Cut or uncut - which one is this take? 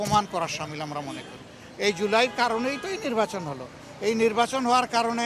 uncut